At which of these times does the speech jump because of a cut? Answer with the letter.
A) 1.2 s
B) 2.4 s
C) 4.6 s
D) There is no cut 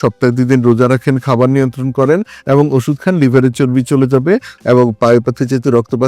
C